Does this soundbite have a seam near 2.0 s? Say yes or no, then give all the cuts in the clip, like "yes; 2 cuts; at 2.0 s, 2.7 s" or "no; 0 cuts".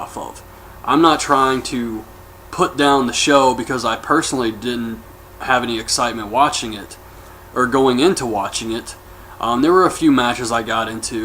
no; 1 cut; at 6.9 s